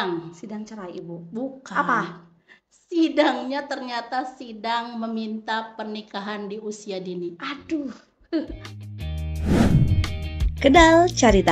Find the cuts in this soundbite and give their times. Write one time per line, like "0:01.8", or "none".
0:08.7